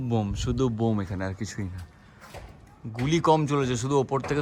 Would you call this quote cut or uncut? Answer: uncut